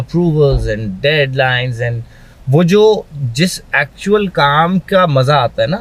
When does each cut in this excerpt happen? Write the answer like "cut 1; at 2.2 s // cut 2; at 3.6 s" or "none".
none